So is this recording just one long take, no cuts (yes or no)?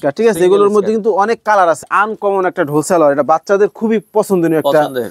no